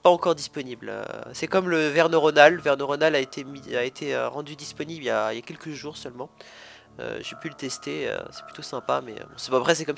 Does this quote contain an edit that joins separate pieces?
no; 0 cuts

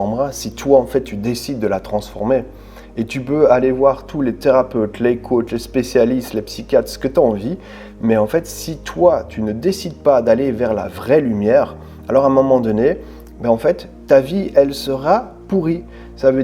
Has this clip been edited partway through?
no; 0 cuts

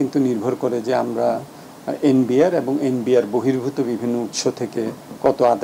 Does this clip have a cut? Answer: no; 0 cuts

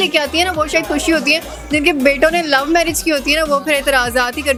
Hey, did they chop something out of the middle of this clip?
no; 0 cuts

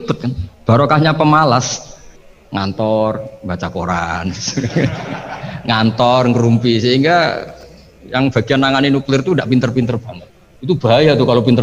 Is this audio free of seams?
yes; 0 cuts

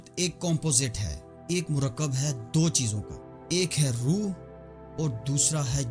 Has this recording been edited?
no; 0 cuts

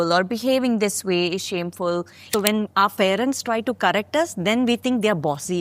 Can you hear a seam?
yes; 1 cut; at 2.2 s

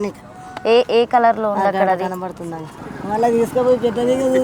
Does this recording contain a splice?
yes; 1 cut; at 2.9 s

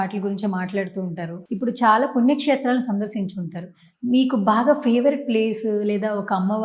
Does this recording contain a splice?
no; 0 cuts

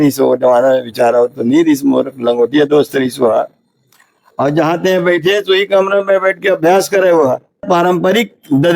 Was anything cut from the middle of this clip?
yes; 1 cut; at 7.6 s

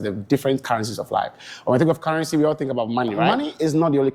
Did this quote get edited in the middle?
yes; 1 cut; at 3.3 s

